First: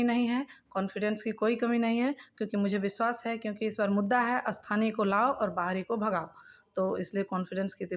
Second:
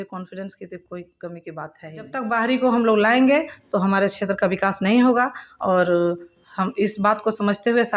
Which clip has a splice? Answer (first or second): second